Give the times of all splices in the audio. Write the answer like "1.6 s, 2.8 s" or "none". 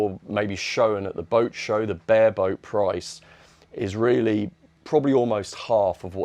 none